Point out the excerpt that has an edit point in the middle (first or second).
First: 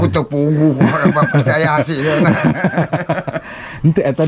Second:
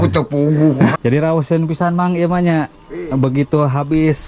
second